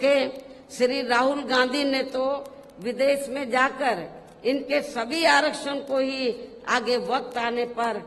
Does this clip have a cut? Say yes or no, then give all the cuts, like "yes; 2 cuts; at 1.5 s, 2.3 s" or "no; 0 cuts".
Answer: no; 0 cuts